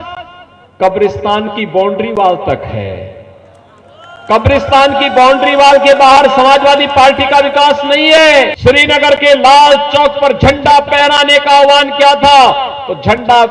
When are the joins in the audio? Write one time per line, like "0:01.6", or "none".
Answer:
0:08.5